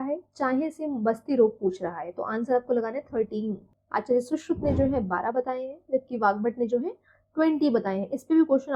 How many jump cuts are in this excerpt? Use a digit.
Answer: 1